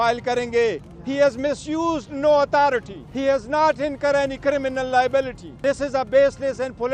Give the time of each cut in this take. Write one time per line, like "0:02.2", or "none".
0:00.9
0:03.0
0:05.4